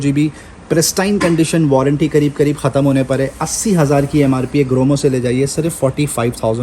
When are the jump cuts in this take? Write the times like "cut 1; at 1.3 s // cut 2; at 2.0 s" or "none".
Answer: none